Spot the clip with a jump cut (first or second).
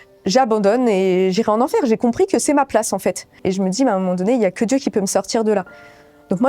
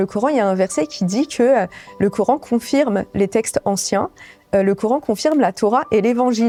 first